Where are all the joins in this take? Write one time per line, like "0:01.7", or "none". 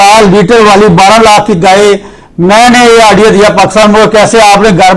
none

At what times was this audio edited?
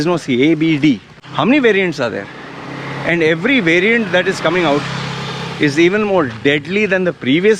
0:01.2

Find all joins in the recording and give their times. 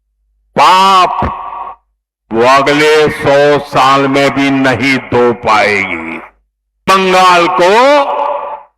0:06.8

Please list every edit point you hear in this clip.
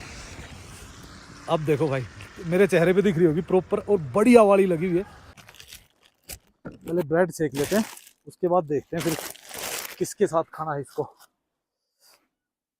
0:05.4

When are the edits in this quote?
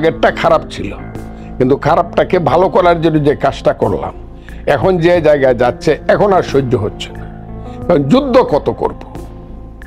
0:08.9

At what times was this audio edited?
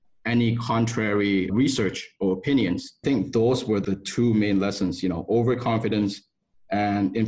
0:01.5
0:02.9
0:03.8

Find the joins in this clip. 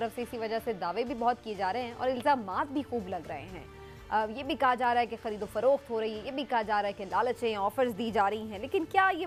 none

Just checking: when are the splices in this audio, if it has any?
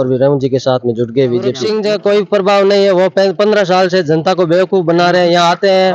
0:01.6

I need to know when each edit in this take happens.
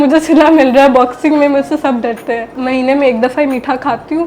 0:02.6

